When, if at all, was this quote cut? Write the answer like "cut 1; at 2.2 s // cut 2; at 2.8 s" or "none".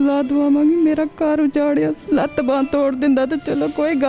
cut 1; at 2.0 s

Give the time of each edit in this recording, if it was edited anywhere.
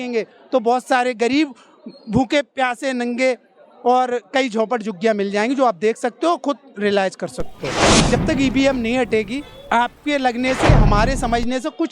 cut 1; at 8.0 s

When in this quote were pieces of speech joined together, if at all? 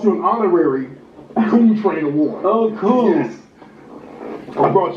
none

